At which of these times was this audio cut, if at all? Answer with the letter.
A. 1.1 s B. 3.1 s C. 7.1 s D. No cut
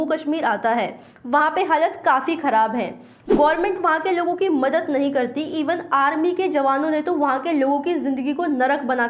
D